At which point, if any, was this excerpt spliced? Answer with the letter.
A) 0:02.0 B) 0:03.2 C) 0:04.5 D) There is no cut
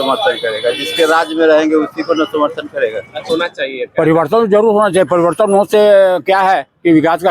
B